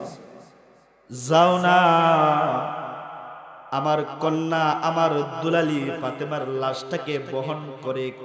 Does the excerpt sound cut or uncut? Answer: uncut